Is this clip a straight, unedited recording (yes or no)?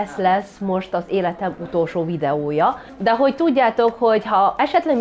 no